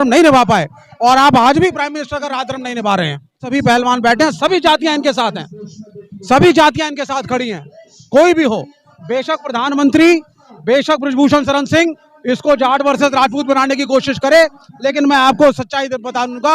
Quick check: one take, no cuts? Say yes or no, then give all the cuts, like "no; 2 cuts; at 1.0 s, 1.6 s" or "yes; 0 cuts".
no; 1 cut; at 3.5 s